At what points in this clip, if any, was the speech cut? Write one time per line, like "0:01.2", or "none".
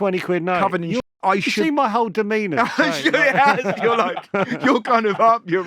0:01.0